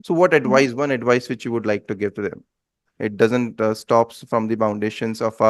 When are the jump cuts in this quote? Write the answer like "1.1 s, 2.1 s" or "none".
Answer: 2.8 s